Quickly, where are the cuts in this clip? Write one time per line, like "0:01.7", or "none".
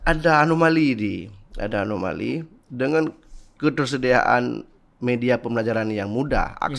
none

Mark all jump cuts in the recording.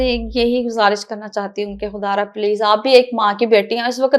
none

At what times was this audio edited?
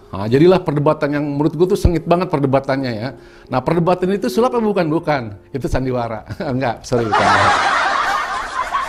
none

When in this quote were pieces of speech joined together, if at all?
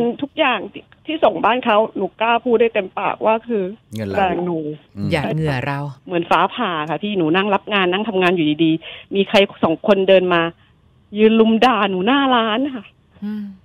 0:03.8
0:06.0

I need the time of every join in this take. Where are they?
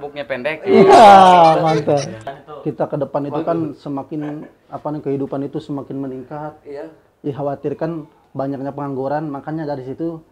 0:02.3

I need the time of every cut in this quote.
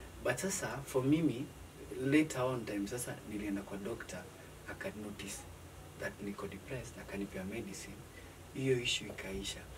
none

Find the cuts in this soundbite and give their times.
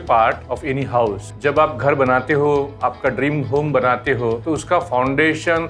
0:01.0
0:04.4

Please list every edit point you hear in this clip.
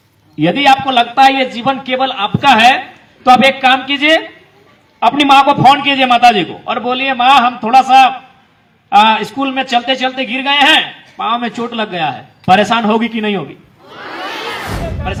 none

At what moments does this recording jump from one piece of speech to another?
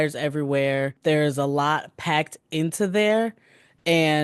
0:01.0

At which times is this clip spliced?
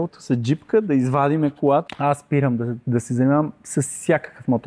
0:01.8

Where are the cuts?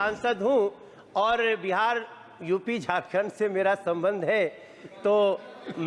none

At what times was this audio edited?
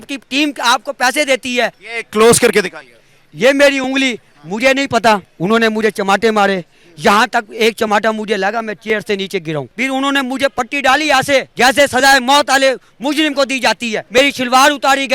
0:01.9
0:05.3
0:09.7
0:11.5
0:14.0

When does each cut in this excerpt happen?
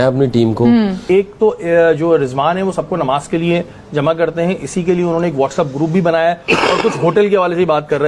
0:01.0

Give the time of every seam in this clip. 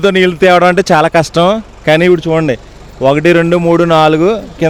none

